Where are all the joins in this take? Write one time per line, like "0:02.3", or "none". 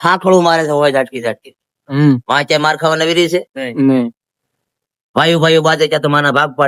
none